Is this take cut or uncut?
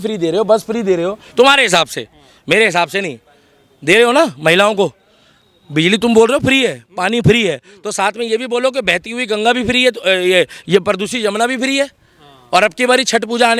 uncut